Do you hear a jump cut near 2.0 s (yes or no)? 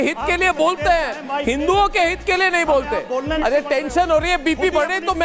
no